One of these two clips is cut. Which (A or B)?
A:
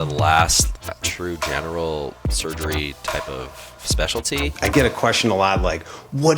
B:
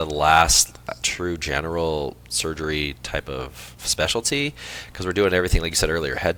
A